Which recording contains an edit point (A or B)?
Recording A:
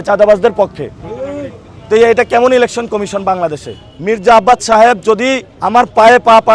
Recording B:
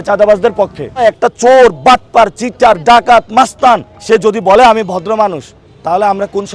B